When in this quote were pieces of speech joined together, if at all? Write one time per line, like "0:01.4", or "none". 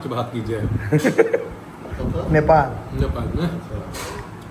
none

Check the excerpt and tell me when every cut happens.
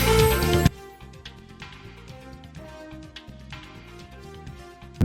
0:03.0

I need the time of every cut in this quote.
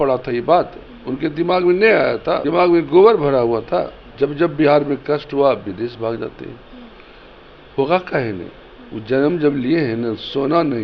0:02.4
0:04.0

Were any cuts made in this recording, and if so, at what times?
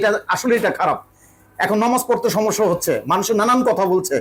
none

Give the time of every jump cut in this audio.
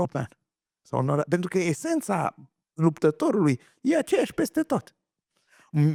none

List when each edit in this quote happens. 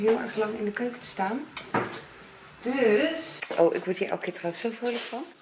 0:03.4

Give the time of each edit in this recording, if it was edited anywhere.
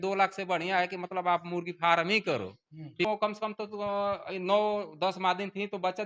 0:03.1

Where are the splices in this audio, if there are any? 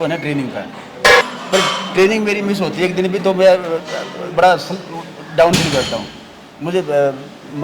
0:01.2

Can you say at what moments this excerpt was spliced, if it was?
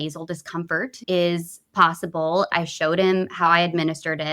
0:01.0
0:02.5

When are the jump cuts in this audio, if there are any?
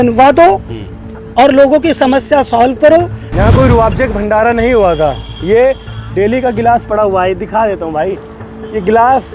0:03.2

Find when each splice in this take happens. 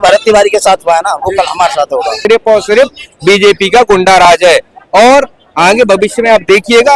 0:02.2

